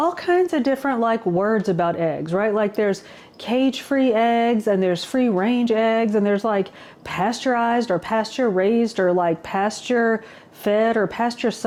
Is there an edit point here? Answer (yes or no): no